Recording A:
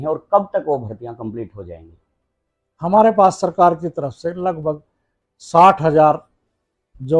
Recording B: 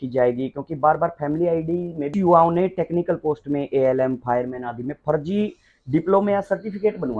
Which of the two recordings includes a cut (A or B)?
B